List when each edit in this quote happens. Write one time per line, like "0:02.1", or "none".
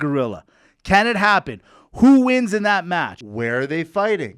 0:03.2